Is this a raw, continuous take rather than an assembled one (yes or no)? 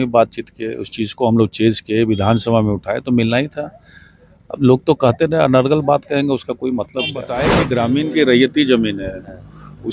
no